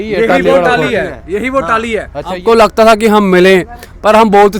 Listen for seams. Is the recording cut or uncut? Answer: cut